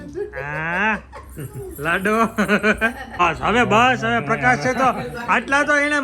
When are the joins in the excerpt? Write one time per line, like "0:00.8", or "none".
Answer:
0:03.2

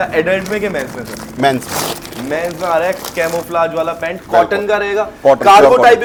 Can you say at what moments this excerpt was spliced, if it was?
none

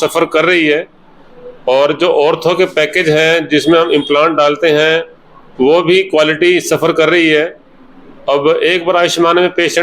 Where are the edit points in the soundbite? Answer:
none

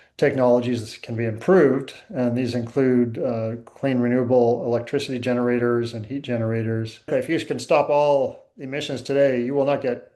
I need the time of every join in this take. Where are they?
0:07.1

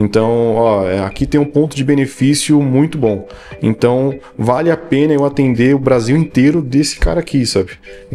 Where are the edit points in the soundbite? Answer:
none

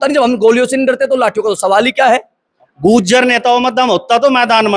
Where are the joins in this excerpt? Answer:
0:02.6

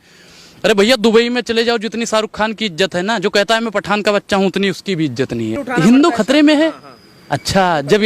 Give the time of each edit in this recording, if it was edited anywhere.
0:05.6

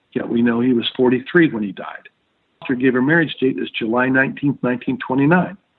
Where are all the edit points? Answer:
0:02.6

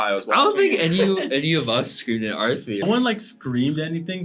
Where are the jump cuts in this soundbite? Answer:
0:02.8

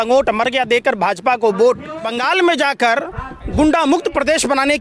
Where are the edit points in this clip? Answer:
0:02.1

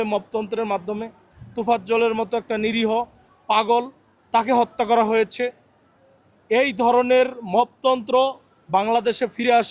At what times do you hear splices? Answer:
none

